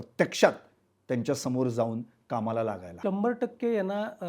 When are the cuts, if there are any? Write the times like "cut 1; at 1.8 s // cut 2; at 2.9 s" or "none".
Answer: cut 1; at 2.9 s

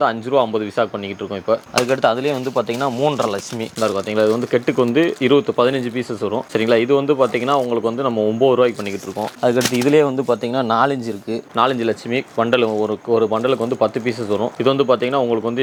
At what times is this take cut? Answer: none

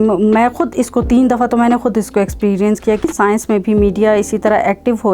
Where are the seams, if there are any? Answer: cut 1; at 3.0 s

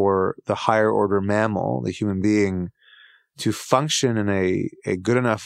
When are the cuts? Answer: none

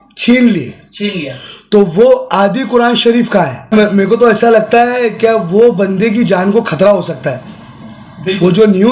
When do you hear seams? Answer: cut 1; at 3.7 s

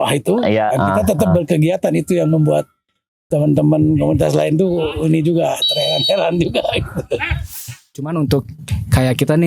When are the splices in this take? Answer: cut 1; at 7.8 s

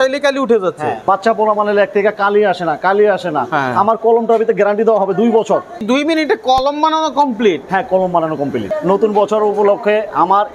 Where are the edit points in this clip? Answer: cut 1; at 1.0 s // cut 2; at 5.8 s // cut 3; at 8.7 s

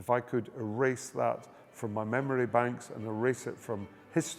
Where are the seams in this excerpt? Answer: none

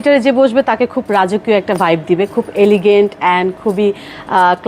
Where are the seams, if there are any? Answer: none

